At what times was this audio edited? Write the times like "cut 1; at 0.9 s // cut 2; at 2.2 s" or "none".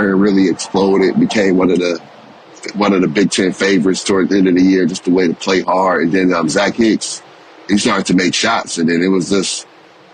none

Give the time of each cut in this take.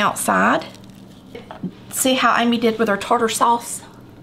cut 1; at 1.5 s

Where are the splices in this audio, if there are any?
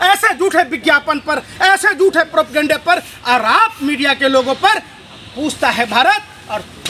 none

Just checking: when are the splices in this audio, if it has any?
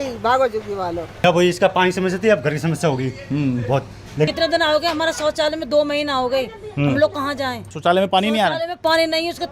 cut 1; at 1.2 s // cut 2; at 4.3 s // cut 3; at 7.7 s

